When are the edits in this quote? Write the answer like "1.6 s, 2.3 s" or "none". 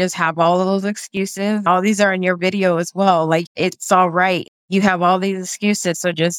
1.7 s, 3.4 s, 4.4 s